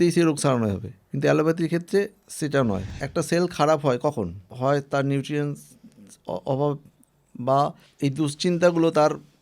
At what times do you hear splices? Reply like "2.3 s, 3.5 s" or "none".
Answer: 2.9 s, 4.5 s, 7.8 s